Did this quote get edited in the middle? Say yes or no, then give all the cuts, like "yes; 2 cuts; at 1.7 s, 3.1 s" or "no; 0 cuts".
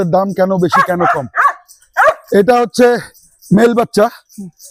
no; 0 cuts